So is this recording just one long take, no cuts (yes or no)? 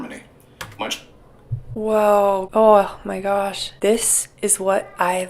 no